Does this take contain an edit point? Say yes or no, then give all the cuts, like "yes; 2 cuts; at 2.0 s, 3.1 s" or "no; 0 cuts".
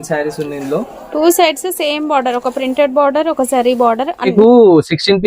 yes; 1 cut; at 4.3 s